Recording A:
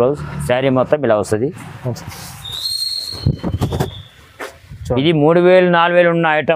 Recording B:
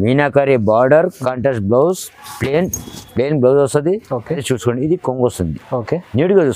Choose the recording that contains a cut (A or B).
B